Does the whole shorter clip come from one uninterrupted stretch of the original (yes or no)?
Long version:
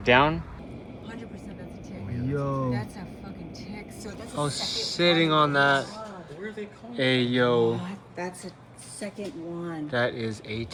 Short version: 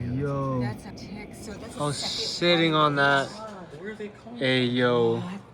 no